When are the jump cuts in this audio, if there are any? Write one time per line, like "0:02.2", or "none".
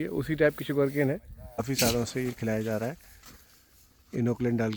0:01.6

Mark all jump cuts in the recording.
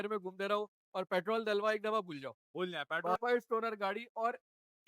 0:03.2

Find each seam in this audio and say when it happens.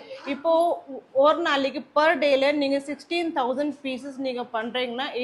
none

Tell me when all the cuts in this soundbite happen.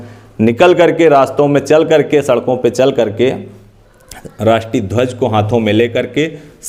none

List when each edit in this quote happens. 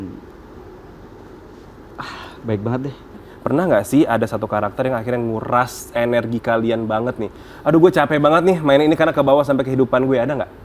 0:03.2

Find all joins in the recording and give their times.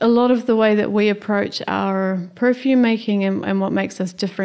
none

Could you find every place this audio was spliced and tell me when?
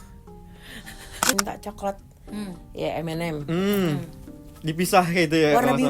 0:01.3

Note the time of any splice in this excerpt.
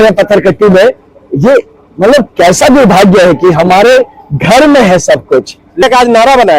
0:05.6

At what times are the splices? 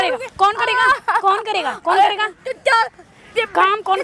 none

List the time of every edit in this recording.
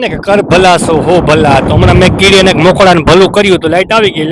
none

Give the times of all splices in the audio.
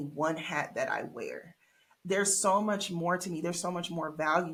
none

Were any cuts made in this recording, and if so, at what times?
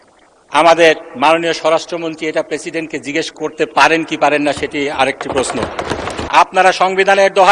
0:06.1

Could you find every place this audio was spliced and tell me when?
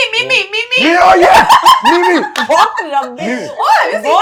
none

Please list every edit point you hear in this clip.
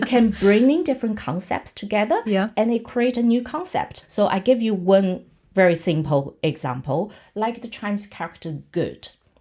0:04.0

